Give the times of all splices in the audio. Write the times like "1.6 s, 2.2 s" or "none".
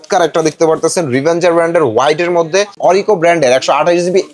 2.7 s